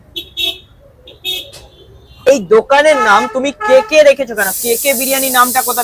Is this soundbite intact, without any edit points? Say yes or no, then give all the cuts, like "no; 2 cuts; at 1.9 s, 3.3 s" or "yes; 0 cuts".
no; 1 cut; at 2.3 s